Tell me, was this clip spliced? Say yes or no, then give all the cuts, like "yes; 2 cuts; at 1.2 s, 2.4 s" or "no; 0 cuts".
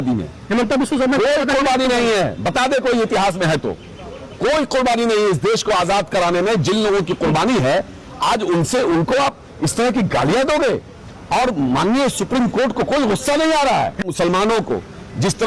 yes; 1 cut; at 14.0 s